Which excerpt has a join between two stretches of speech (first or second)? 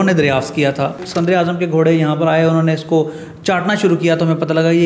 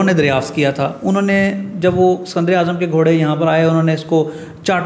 first